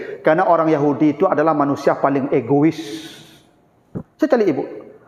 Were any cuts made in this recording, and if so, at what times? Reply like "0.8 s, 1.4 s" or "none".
none